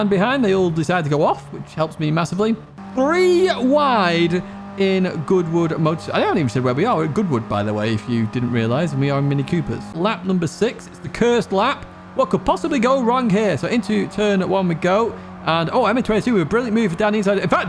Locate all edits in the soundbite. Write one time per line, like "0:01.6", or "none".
0:02.8
0:09.9